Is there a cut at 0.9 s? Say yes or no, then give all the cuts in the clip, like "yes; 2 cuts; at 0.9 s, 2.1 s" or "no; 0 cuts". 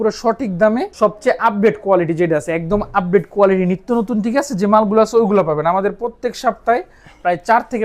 yes; 1 cut; at 0.9 s